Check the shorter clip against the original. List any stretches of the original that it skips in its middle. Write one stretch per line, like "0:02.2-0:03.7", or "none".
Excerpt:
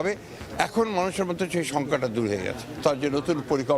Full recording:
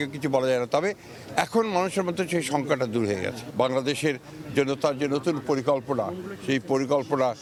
0:03.6-0:04.8